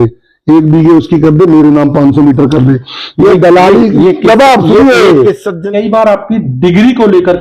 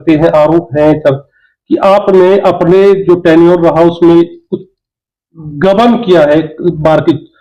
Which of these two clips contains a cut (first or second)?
first